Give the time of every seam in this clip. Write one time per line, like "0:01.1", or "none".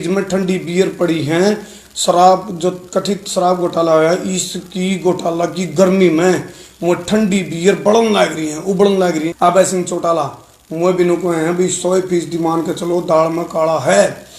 0:09.3